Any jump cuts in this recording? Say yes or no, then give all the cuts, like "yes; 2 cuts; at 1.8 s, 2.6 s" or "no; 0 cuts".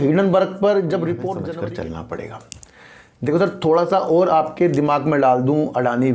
yes; 1 cut; at 1.4 s